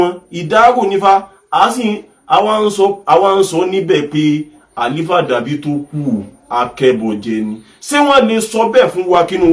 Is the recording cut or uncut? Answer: uncut